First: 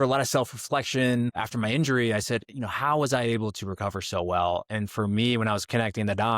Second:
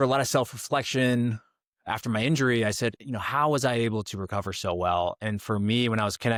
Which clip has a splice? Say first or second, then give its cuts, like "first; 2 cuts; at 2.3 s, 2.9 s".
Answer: first; 1 cut; at 1.4 s